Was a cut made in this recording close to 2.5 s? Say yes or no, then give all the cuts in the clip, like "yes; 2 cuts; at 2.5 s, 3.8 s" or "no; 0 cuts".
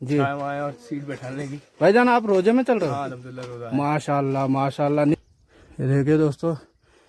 no; 1 cut; at 5.1 s